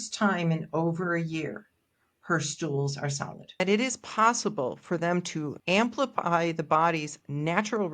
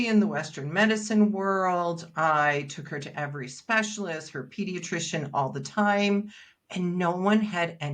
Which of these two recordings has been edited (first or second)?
first